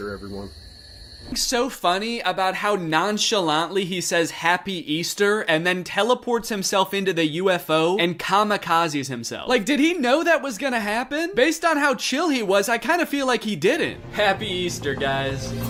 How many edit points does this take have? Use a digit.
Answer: 0